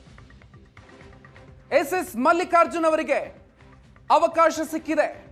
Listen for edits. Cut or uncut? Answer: uncut